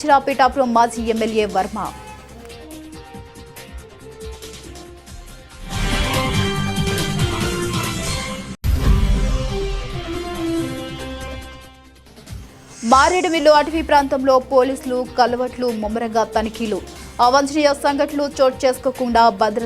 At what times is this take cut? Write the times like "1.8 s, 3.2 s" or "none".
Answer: 3.5 s, 6.3 s, 8.6 s, 11.3 s, 12.8 s